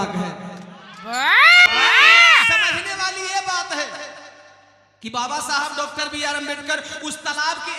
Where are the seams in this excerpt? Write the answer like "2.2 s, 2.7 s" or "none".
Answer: 1.7 s